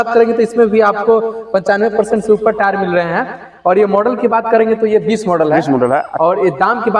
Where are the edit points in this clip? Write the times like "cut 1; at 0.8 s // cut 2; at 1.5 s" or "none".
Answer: none